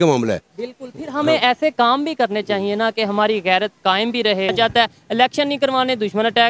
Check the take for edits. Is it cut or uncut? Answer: cut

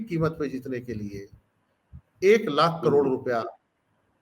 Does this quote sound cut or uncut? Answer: uncut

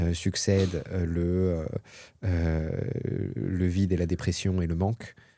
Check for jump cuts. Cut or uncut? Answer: uncut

